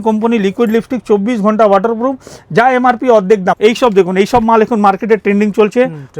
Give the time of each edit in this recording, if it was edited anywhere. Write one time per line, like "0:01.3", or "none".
0:03.6